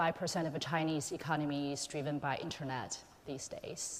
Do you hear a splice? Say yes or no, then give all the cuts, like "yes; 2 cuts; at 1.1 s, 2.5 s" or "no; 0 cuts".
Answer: no; 0 cuts